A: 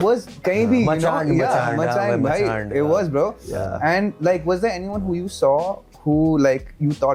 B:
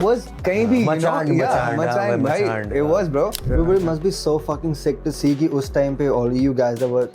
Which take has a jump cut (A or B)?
B